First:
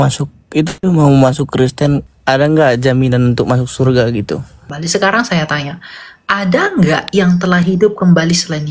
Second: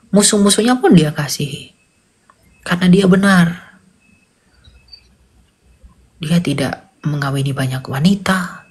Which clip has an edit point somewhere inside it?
first; 2 cuts; at 2.1 s, 4.7 s

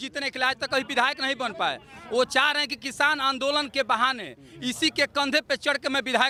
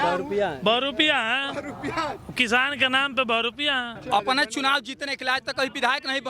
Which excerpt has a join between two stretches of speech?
second; 1 cut; at 3.9 s

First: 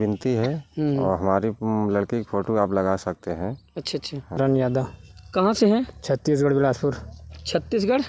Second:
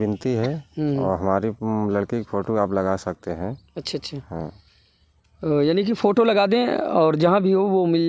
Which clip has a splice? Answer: first; 1 cut; at 4.4 s

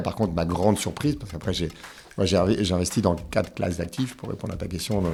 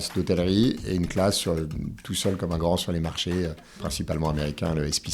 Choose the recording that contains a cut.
second; 1 cut; at 3.9 s

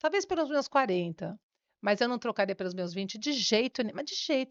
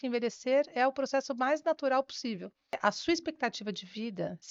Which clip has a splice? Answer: second; 1 cut; at 2.8 s

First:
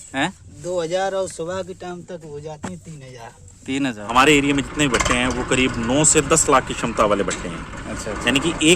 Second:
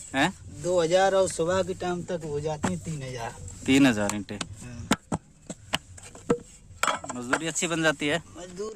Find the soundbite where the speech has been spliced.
first; 1 cut; at 4.0 s

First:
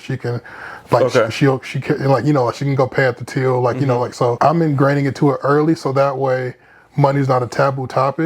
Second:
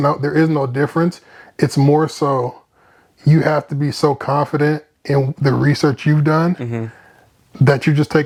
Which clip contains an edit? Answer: first; 1 cut; at 4.4 s

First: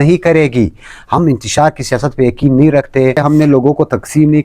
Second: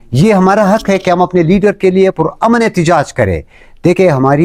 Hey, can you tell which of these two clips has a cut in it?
first; 1 cut; at 3.2 s

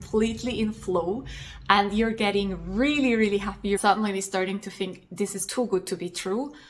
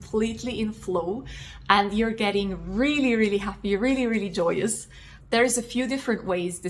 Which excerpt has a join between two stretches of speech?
first; 1 cut; at 3.8 s

